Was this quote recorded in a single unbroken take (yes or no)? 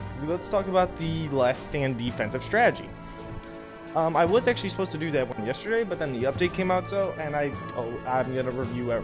no